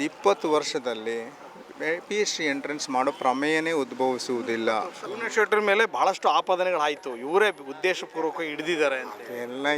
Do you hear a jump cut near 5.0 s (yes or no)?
yes